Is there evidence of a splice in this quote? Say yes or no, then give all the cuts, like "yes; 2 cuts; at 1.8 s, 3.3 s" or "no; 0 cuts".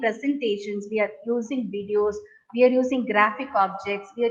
no; 0 cuts